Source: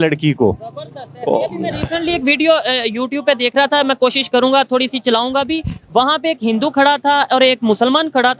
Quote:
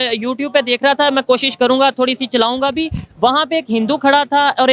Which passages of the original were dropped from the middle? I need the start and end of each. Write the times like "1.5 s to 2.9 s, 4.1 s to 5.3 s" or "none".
none